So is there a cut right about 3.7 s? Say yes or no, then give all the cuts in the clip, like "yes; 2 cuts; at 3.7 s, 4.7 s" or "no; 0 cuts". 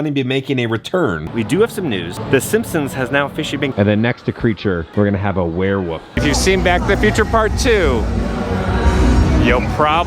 yes; 3 cuts; at 1.3 s, 3.7 s, 6.1 s